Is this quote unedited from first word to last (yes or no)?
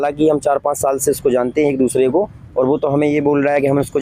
yes